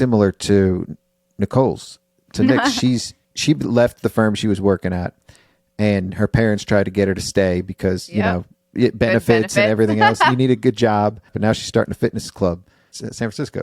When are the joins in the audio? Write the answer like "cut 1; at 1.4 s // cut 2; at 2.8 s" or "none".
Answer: cut 1; at 3.3 s // cut 2; at 11.2 s // cut 3; at 12.8 s

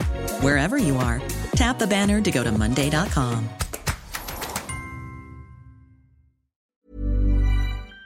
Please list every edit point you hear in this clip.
cut 1; at 6.8 s

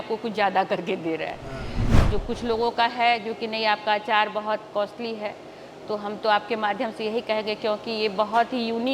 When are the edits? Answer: cut 1; at 1.9 s

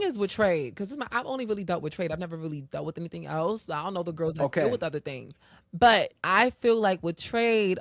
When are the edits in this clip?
cut 1; at 6.2 s

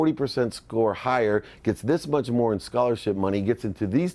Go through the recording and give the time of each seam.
none

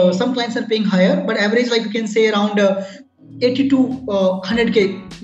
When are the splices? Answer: cut 1; at 3.0 s

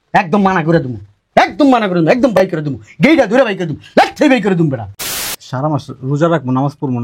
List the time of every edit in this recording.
cut 1; at 5.2 s

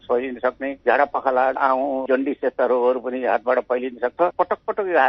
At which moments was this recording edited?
cut 1; at 1.6 s // cut 2; at 4.2 s

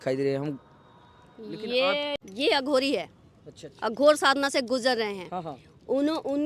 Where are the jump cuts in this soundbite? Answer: cut 1; at 2.1 s

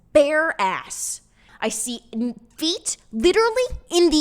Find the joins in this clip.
cut 1; at 1.5 s

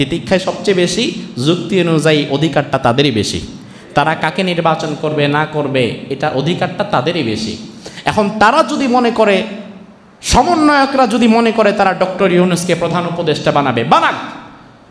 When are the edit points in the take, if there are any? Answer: none

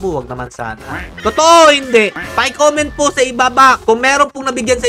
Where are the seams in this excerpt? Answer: cut 1; at 1.0 s

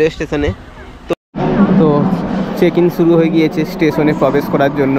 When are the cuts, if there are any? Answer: cut 1; at 1.1 s

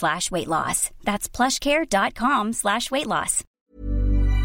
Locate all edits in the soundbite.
cut 1; at 3.4 s

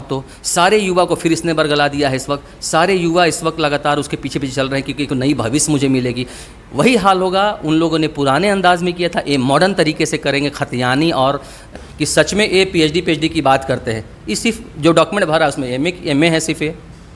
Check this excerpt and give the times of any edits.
cut 1; at 11.7 s

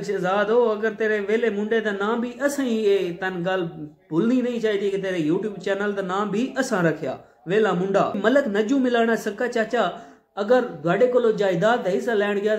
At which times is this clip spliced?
cut 1; at 8.2 s

